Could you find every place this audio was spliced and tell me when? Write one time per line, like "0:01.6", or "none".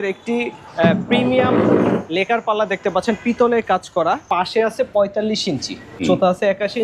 0:04.3
0:06.0